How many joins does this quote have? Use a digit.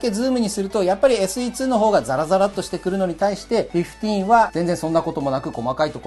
0